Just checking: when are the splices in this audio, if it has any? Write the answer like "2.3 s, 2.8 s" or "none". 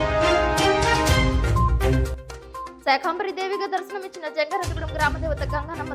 2.2 s